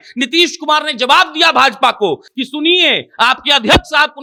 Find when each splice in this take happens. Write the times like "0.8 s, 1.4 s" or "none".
none